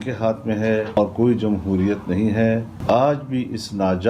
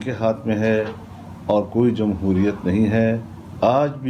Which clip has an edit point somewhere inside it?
first; 2 cuts; at 1.0 s, 2.7 s

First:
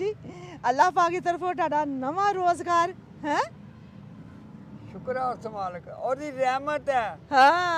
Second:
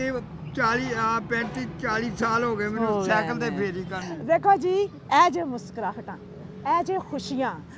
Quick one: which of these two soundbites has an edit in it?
second; 1 cut; at 4.1 s

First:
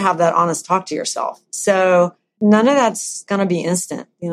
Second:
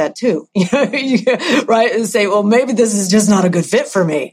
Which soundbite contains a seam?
first; 2 cuts; at 2.4 s, 3.3 s

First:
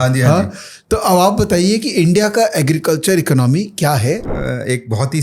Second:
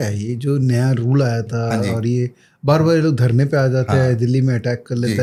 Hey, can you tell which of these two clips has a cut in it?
first; 1 cut; at 4.3 s

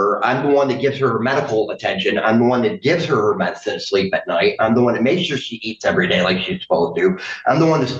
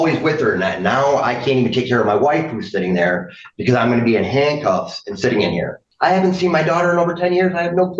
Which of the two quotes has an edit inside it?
second; 1 cut; at 5.9 s

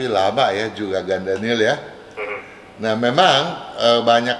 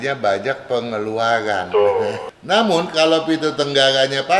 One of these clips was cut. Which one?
second; 1 cut; at 2.2 s

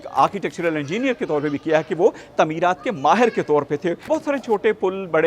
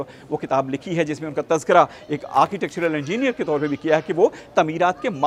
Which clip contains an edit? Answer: first; 1 cut; at 4.0 s

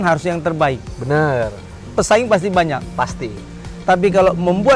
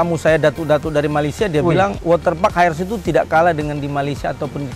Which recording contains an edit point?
second; 1 cut; at 2.0 s

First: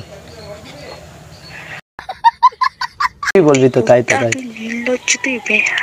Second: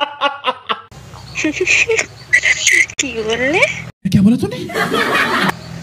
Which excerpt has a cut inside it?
first; 1 cut; at 3.3 s

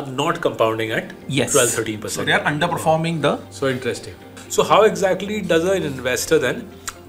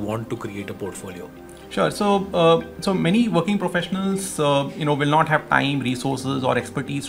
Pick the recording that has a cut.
first; 1 cut; at 4.3 s

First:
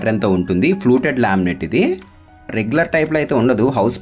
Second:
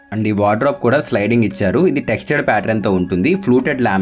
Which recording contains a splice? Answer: first; 1 cut; at 2.5 s

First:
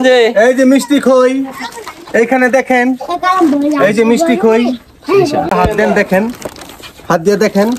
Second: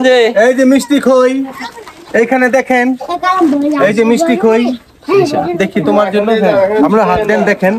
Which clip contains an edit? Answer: first; 1 cut; at 5.5 s

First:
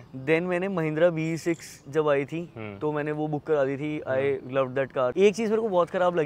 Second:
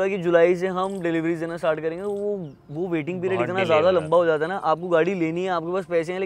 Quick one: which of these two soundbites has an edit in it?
first; 1 cut; at 5.1 s

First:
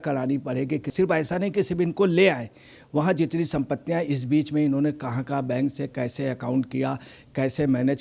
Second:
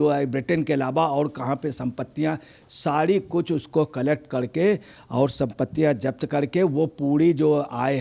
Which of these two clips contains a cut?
first; 1 cut; at 0.9 s

